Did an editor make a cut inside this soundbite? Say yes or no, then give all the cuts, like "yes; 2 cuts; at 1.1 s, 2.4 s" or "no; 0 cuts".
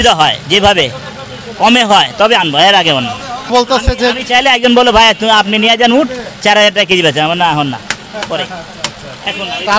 yes; 1 cut; at 3.5 s